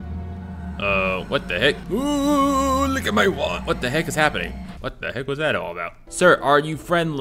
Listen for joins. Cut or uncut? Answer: cut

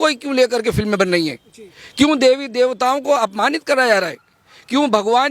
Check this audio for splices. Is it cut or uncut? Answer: uncut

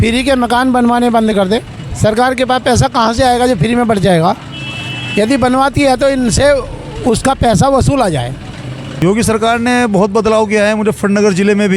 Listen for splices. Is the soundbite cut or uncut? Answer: cut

